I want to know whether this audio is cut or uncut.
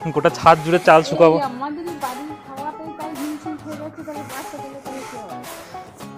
uncut